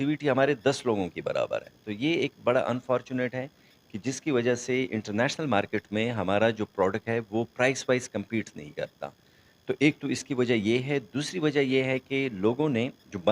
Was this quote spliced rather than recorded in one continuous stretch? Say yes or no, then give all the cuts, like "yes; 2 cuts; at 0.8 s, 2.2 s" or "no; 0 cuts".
no; 0 cuts